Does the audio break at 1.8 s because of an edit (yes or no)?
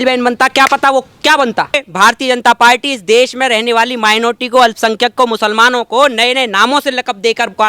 yes